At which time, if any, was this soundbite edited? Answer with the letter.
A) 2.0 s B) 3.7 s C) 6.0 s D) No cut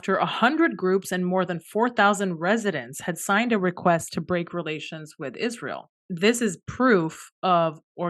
C